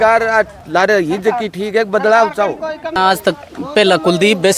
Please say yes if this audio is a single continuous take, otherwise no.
no